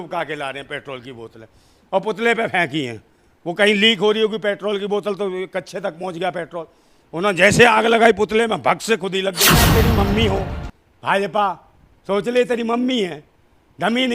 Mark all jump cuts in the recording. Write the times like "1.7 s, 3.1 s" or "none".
9.6 s